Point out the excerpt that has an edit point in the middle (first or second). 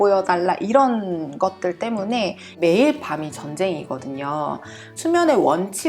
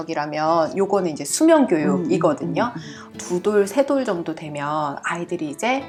first